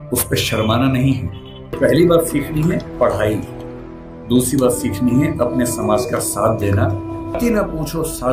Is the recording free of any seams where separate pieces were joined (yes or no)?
no